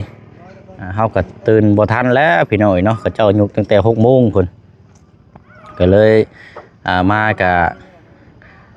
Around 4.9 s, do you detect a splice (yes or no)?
no